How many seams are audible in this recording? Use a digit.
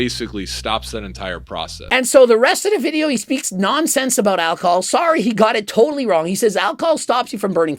1